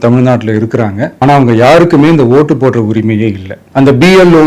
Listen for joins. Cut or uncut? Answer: uncut